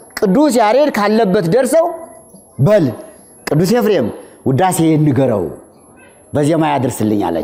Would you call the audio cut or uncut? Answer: uncut